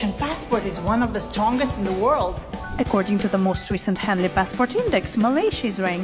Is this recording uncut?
yes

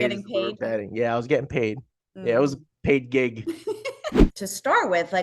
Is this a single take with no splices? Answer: no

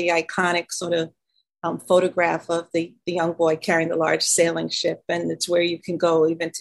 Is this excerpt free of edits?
yes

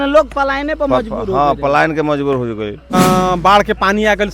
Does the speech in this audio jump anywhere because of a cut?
yes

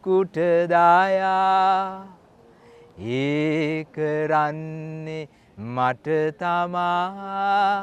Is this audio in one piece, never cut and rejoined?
yes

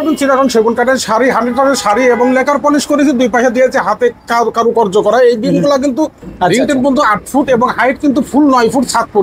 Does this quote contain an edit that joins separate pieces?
yes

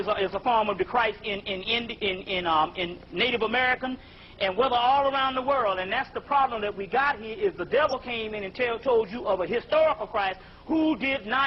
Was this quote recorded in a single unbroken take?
yes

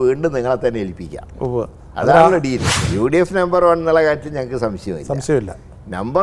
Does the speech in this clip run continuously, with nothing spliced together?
no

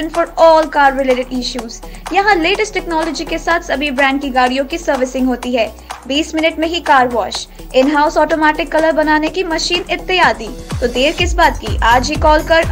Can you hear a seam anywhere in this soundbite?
no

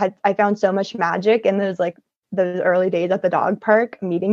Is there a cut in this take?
no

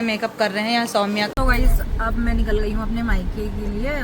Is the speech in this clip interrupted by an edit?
yes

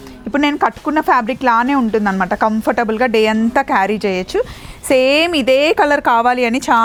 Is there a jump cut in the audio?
no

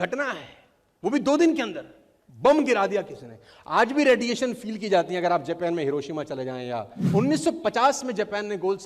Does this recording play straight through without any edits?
no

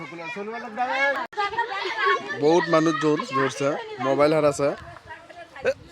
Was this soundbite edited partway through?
yes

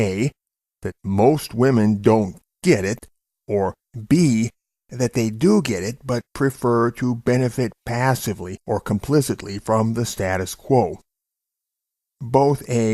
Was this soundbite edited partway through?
no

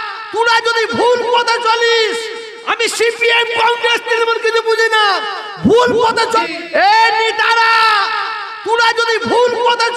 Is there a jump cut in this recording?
no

